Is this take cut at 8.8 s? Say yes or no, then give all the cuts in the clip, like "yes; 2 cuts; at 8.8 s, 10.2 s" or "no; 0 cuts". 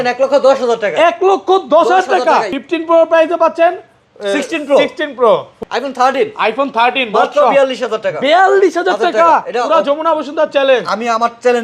no; 2 cuts; at 2.5 s, 5.5 s